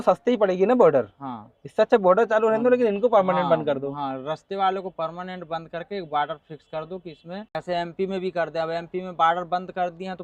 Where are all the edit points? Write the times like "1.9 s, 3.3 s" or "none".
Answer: none